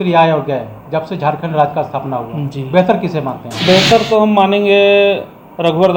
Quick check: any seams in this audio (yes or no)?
no